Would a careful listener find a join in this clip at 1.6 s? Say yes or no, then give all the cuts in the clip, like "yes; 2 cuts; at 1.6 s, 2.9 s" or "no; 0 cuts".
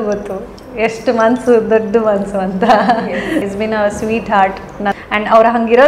no; 2 cuts; at 3.5 s, 4.9 s